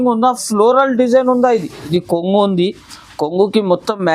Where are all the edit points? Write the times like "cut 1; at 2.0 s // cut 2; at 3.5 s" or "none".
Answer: cut 1; at 1.9 s